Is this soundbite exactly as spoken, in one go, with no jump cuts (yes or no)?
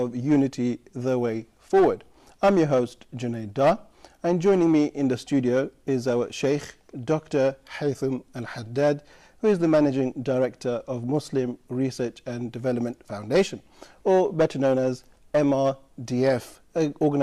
no